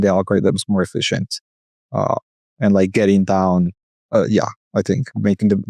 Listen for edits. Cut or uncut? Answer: uncut